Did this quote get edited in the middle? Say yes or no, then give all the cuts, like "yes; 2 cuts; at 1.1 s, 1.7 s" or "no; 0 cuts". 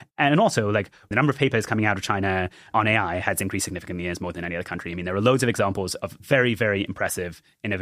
yes; 3 cuts; at 1.1 s, 2.7 s, 6.2 s